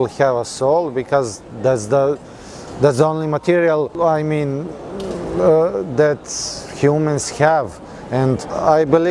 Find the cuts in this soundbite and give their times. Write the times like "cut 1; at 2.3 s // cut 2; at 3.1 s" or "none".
none

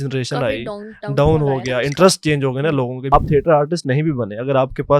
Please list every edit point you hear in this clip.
cut 1; at 3.1 s

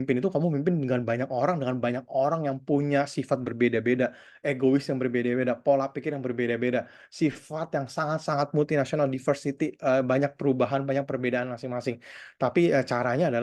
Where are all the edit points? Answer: none

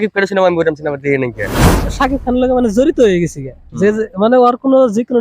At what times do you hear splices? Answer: cut 1; at 1.8 s

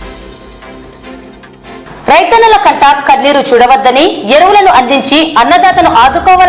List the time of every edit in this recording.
cut 1; at 1.7 s

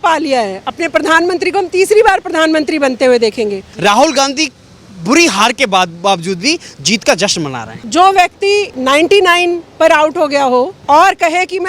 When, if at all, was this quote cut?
cut 1; at 3.6 s // cut 2; at 7.8 s // cut 3; at 8.7 s // cut 4; at 10.8 s

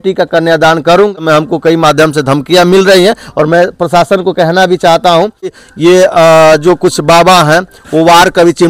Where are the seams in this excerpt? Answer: cut 1; at 1.1 s // cut 2; at 5.6 s

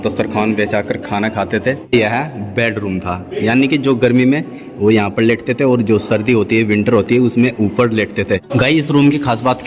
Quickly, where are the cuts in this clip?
cut 1; at 1.9 s // cut 2; at 8.5 s

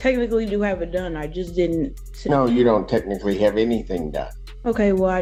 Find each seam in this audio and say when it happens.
none

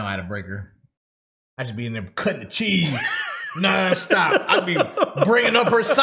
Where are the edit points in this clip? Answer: none

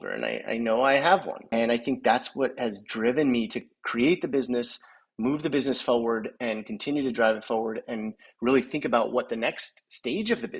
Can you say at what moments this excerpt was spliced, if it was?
cut 1; at 1.4 s

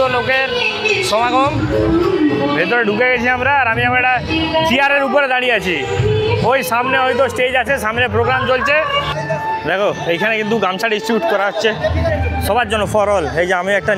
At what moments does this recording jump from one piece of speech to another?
none

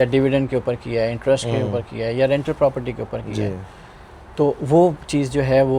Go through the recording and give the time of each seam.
none

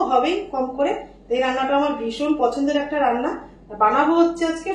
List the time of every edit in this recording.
none

